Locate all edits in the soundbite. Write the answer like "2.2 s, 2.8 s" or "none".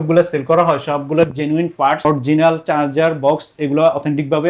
none

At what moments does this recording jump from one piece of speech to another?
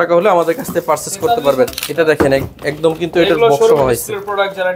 1.7 s

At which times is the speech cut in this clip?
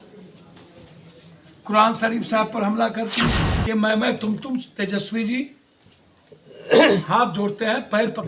3.5 s

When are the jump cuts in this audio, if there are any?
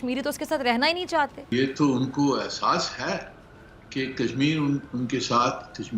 1.5 s

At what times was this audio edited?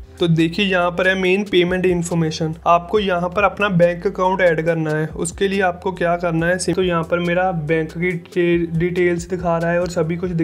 2.5 s, 6.7 s

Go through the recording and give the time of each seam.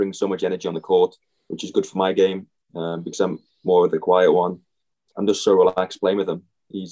5.1 s

